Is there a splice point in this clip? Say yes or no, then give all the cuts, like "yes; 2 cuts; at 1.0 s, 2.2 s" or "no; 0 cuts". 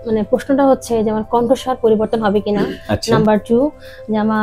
no; 0 cuts